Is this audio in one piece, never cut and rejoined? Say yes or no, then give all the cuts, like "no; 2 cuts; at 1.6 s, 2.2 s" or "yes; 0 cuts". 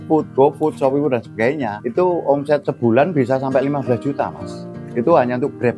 yes; 0 cuts